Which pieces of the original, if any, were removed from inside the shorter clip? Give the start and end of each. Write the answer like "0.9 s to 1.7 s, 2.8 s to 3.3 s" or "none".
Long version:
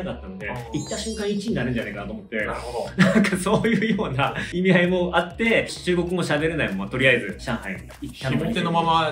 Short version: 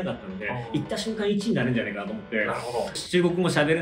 2.9 s to 5.7 s